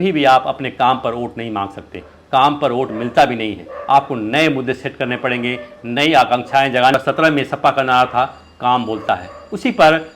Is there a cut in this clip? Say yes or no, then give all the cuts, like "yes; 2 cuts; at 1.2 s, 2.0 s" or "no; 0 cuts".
yes; 1 cut; at 6.9 s